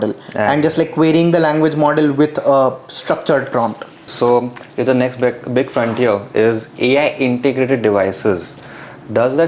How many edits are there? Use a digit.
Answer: 1